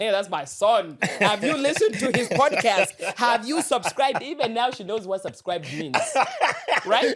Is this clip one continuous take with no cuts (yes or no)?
yes